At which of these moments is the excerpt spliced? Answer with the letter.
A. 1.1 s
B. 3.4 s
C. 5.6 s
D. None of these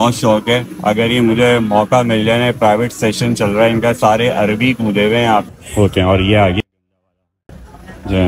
C